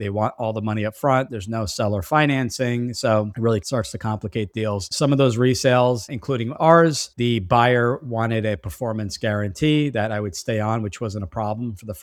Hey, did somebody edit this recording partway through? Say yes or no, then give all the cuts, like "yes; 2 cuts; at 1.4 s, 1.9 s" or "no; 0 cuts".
no; 0 cuts